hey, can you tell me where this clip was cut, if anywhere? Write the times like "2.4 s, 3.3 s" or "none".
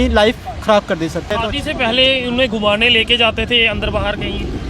1.3 s